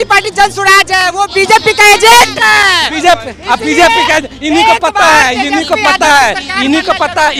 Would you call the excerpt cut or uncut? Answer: uncut